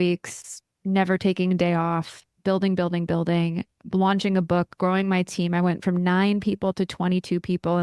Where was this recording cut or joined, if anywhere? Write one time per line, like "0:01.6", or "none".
none